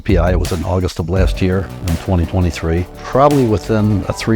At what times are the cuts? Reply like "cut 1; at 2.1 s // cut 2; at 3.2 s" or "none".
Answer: cut 1; at 3.0 s